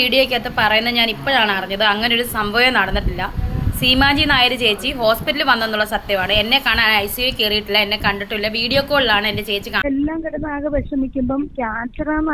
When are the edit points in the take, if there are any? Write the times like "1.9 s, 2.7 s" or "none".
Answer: 9.8 s